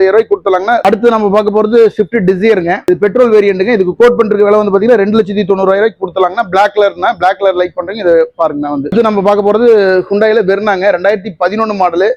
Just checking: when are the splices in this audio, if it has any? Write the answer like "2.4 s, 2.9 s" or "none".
0.8 s, 2.8 s